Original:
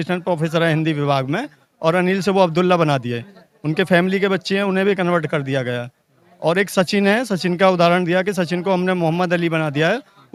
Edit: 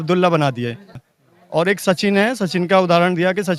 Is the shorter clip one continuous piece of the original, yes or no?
no